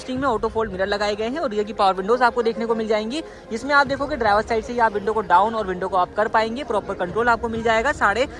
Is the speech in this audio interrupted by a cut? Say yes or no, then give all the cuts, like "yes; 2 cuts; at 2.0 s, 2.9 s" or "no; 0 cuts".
no; 0 cuts